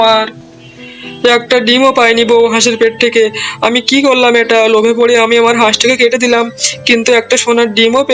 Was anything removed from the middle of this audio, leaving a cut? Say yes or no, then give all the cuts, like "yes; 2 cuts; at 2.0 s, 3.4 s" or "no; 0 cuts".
no; 0 cuts